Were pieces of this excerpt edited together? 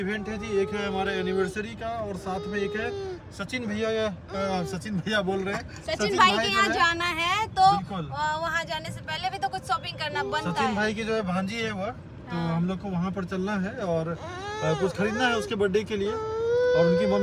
no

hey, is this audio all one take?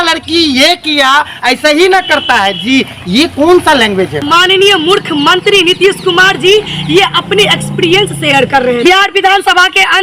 no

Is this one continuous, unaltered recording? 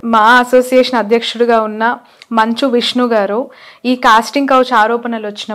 yes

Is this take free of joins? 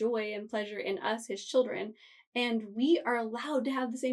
yes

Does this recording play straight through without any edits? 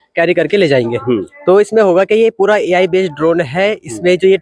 yes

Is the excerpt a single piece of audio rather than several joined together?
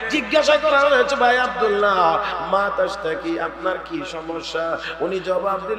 yes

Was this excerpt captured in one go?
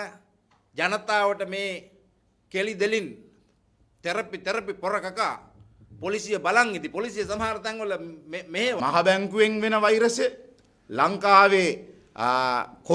no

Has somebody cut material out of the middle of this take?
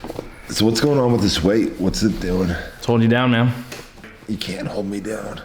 yes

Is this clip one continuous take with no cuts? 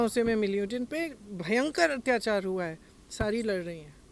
yes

